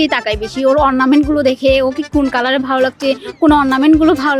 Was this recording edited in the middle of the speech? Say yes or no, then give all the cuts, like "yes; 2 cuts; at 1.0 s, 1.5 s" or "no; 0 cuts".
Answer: no; 0 cuts